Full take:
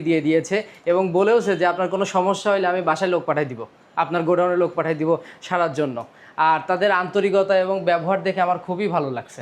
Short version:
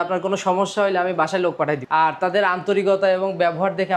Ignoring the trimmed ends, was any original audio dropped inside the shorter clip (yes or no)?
yes